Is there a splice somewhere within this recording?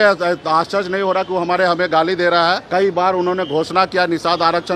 yes; 1 cut; at 2.6 s

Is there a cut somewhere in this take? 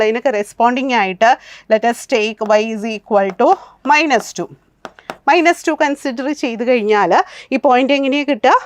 no; 0 cuts

